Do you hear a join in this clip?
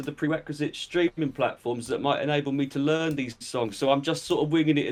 no; 0 cuts

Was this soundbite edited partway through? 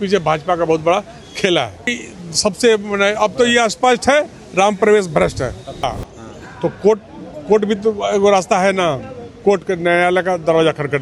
yes; 2 cuts; at 1.9 s, 5.9 s

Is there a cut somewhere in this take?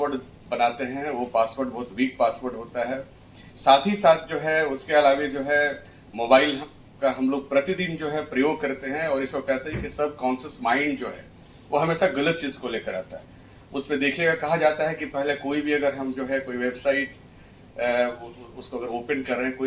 no; 0 cuts

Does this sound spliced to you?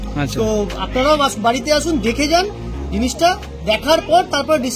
no; 0 cuts

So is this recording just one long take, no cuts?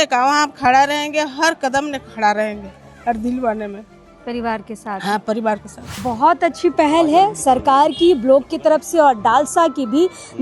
no; 1 cut; at 5.9 s

